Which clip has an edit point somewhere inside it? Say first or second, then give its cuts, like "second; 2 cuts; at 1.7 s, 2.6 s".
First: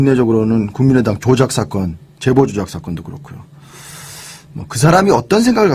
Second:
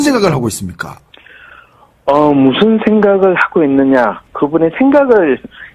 second; 1 cut; at 2.6 s